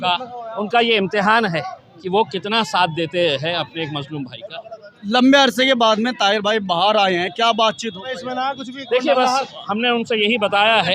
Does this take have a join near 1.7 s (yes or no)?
no